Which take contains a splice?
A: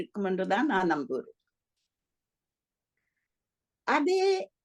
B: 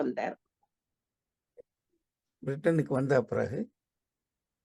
B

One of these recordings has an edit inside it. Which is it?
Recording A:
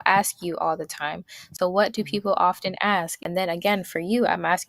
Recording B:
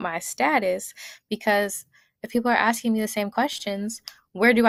A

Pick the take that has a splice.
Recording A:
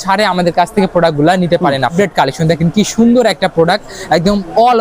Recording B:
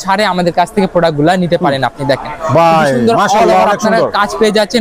A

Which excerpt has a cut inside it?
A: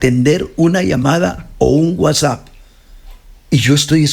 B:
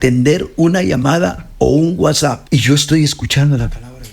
B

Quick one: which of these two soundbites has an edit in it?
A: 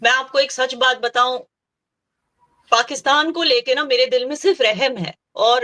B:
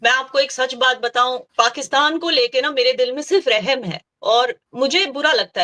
B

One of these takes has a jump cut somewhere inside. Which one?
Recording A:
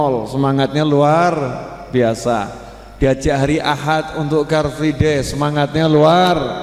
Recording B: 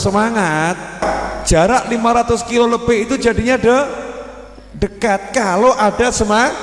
B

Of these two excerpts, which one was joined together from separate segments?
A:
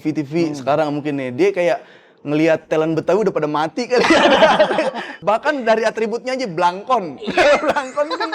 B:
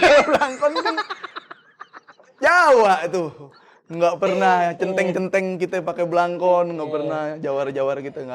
A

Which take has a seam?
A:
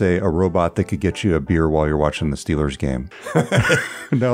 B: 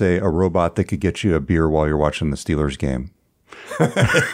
A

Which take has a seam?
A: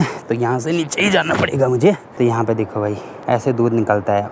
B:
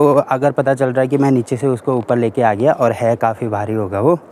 A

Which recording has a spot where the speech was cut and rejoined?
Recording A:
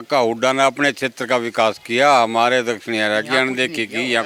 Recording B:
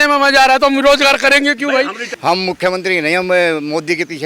B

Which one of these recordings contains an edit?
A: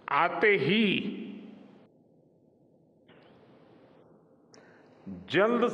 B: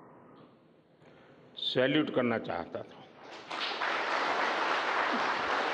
A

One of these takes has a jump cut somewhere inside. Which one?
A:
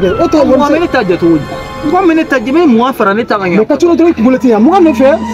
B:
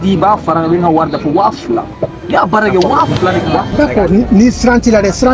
B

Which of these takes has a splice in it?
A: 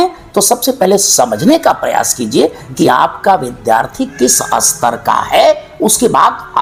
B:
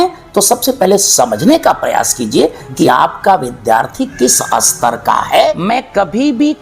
B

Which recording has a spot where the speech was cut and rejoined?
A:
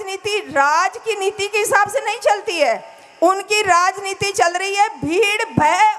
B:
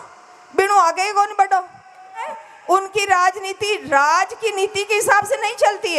B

